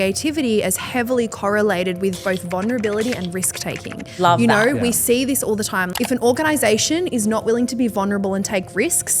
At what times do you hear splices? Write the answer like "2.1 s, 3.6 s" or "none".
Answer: 5.8 s